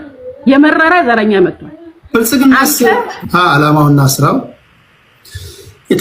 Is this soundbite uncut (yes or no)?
no